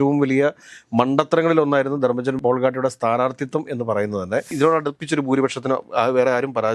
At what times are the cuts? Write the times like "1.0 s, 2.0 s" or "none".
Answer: 4.5 s

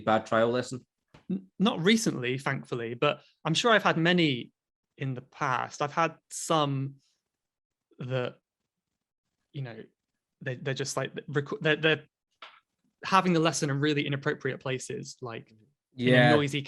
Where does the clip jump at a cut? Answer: 1.2 s

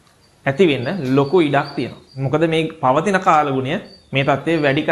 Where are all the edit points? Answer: none

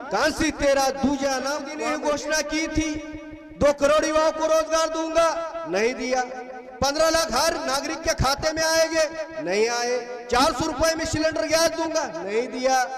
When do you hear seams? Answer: 1.7 s

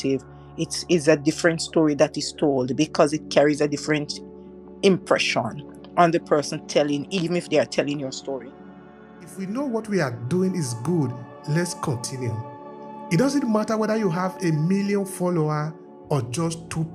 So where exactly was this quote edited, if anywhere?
8.8 s

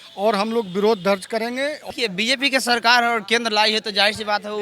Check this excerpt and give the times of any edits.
1.8 s

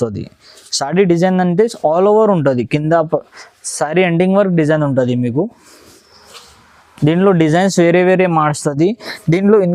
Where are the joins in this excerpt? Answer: none

